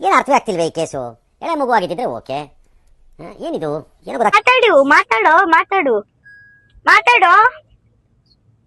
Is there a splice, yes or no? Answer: no